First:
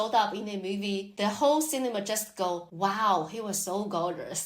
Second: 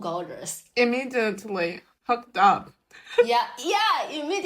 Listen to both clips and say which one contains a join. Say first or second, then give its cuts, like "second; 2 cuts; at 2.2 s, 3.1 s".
first; 2 cuts; at 1.1 s, 2.7 s